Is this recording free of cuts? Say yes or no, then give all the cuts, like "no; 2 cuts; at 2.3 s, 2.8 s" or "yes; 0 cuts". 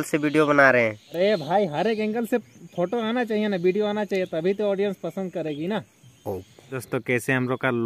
no; 2 cuts; at 1.0 s, 6.8 s